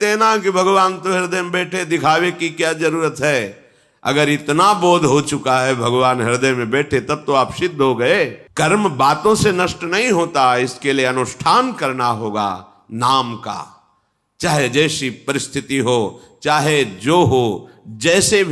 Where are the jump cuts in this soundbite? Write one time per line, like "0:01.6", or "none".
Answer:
0:08.4